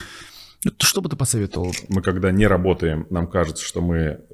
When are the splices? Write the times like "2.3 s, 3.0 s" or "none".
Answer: 1.8 s

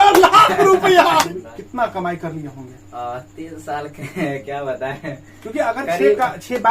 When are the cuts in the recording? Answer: 1.3 s

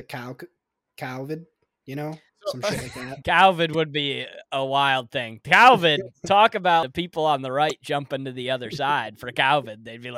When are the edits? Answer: 3.3 s, 6.9 s

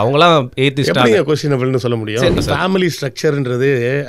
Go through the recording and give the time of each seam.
2.4 s

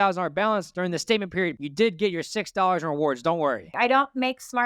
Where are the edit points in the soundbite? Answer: 3.7 s

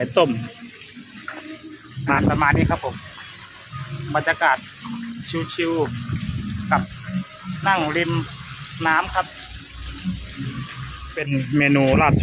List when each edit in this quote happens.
2.2 s, 11.0 s

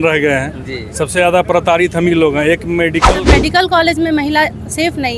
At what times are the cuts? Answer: 3.0 s

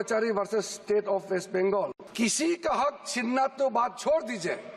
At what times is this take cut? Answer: 2.0 s

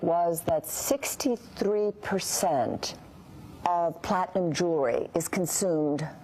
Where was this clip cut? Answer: 3.1 s

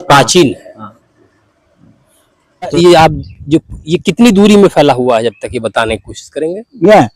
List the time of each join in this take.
2.7 s

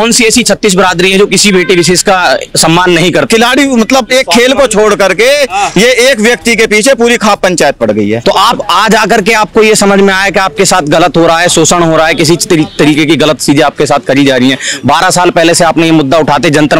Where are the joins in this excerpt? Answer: 3.3 s, 8.2 s

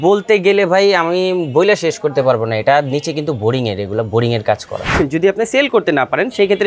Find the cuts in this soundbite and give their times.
5.0 s

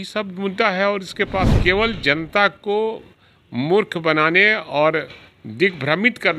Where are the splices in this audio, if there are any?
1.4 s

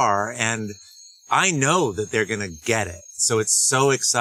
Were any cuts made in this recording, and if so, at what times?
3.2 s

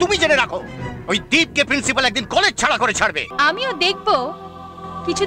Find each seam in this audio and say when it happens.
3.2 s

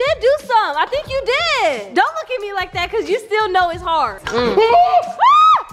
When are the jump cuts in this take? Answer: 4.2 s

